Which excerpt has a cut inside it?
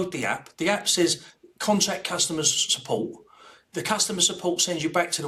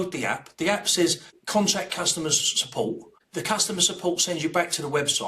second; 2 cuts; at 1.3 s, 3.1 s

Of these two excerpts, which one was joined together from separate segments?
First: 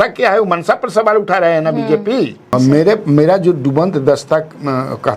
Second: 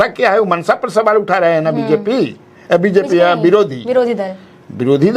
first; 1 cut; at 2.5 s

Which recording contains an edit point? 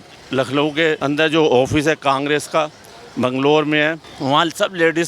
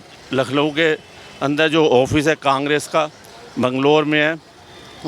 first; 2 cuts; at 1.0 s, 4.1 s

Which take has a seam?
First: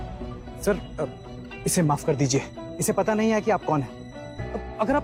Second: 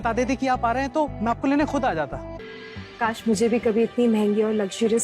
second; 1 cut; at 2.3 s

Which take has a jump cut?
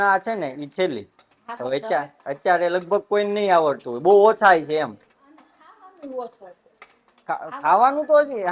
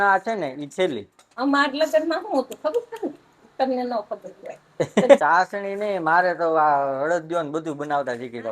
second; 2 cuts; at 1.3 s, 5.2 s

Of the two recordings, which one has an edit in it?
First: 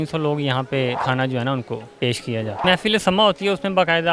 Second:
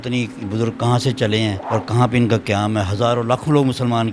first; 2 cuts; at 1.0 s, 2.6 s

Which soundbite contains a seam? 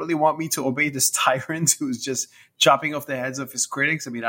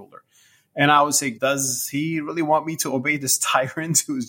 second; 1 cut; at 1.3 s

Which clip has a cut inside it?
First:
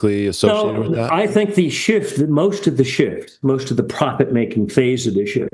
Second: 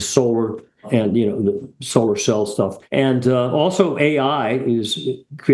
second; 1 cut; at 2.8 s

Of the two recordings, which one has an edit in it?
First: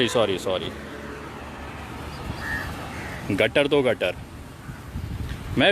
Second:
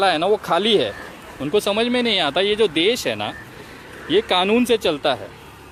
first; 1 cut; at 2.8 s

